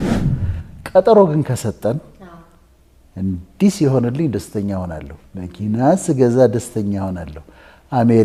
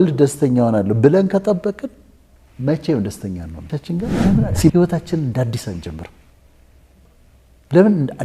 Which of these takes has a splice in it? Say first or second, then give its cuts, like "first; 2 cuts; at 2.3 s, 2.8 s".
second; 1 cut; at 3.7 s